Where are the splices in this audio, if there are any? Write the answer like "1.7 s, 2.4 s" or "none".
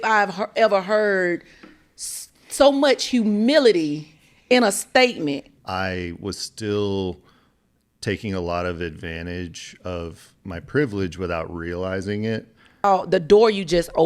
5.5 s, 12.8 s